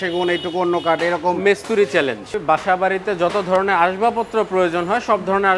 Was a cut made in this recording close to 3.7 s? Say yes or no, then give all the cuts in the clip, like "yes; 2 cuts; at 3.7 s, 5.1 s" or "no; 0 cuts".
no; 1 cut; at 2.4 s